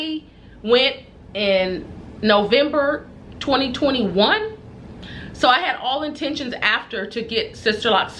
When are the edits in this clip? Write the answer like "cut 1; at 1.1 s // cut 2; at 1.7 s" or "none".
none